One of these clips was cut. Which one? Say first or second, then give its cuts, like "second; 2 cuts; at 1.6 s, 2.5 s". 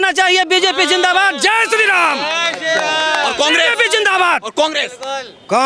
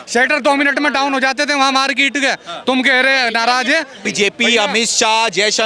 second; 1 cut; at 4.1 s